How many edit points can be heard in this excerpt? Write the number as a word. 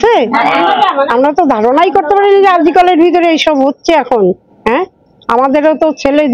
zero